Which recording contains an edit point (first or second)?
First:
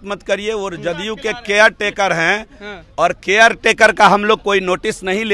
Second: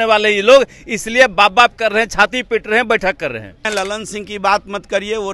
second